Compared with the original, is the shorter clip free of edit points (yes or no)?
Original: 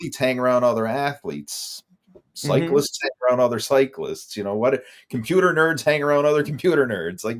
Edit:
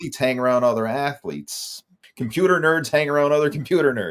no